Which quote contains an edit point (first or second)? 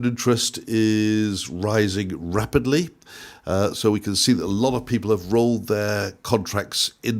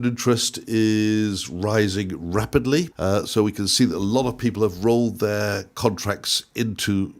second